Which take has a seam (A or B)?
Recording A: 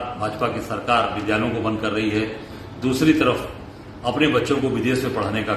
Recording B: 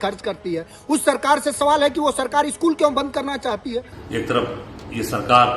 B